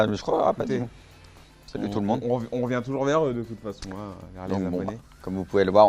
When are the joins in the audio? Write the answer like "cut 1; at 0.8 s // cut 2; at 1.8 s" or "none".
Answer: cut 1; at 2.9 s